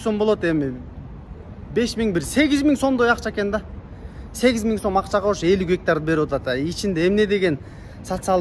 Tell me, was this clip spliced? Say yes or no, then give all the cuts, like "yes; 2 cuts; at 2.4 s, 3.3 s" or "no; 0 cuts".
no; 0 cuts